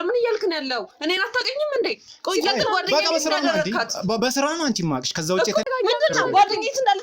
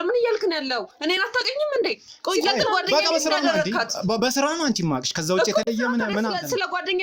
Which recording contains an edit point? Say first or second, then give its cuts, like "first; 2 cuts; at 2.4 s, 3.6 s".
first; 1 cut; at 5.7 s